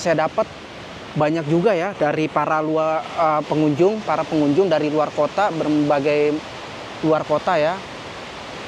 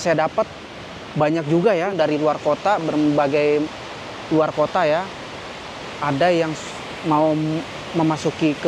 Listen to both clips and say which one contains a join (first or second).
second